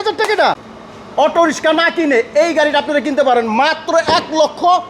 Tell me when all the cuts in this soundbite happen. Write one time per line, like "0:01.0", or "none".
0:01.0